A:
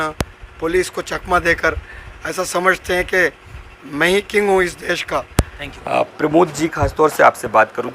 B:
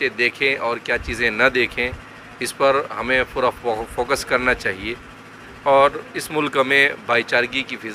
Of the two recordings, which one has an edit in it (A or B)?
A